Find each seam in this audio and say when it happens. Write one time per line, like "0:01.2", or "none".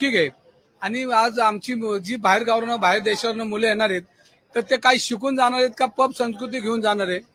none